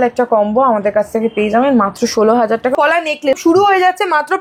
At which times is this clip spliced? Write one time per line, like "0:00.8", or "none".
0:02.8